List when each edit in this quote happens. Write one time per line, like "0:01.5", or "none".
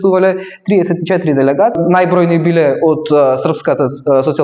0:01.8

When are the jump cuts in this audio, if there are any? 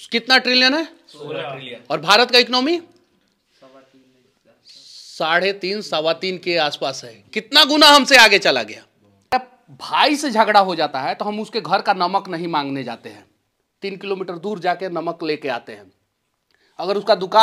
0:09.3

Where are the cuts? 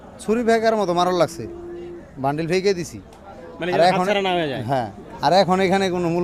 none

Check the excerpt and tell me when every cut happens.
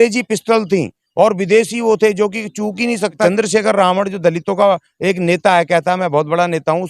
0:03.2

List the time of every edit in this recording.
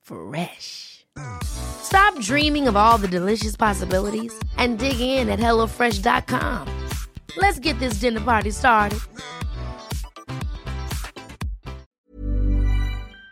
0:11.9

